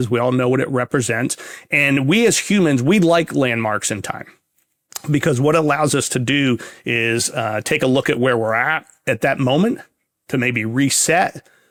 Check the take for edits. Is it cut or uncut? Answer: uncut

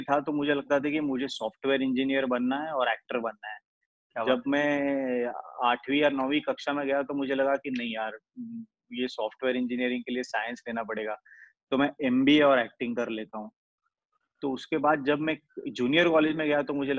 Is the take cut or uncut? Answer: uncut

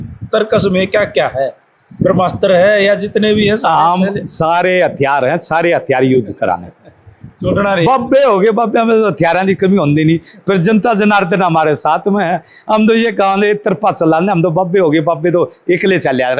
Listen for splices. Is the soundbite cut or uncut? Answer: uncut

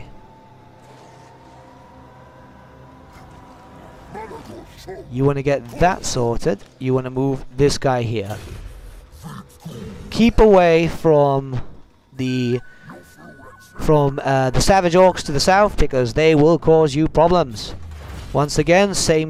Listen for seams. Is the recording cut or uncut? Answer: uncut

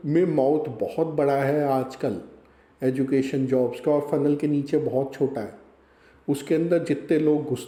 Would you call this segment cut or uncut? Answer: uncut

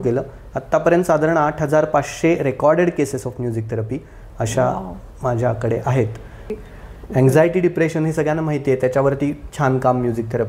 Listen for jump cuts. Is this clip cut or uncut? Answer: cut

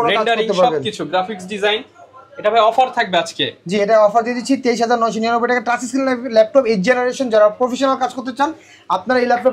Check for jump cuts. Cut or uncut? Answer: uncut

